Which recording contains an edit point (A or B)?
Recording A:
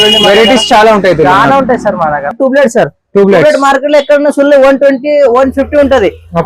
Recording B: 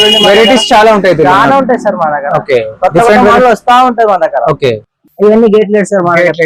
A